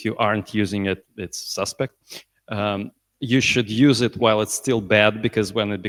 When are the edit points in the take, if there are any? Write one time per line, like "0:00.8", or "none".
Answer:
none